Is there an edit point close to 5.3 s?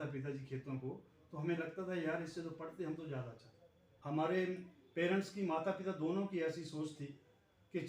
no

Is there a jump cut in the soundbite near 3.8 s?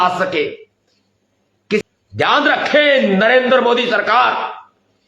no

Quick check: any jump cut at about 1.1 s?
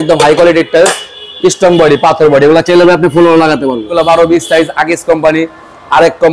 no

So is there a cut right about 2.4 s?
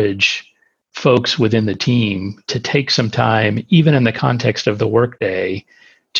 no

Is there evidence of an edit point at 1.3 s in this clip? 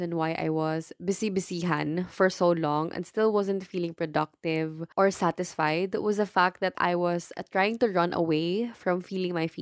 no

